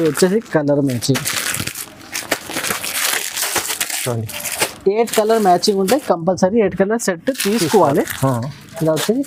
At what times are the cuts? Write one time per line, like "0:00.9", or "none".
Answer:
none